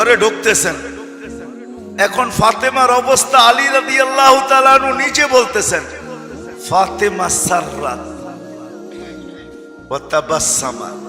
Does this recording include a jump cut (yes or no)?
yes